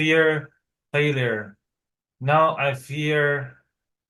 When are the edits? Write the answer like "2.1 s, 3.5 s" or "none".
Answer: none